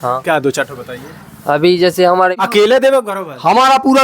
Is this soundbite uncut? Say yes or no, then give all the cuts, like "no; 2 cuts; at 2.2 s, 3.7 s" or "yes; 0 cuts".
no; 1 cut; at 2.3 s